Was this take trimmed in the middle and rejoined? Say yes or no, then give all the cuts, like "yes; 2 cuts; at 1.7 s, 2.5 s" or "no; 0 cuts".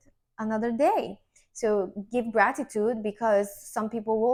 no; 0 cuts